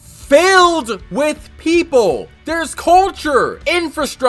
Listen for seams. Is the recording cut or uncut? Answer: uncut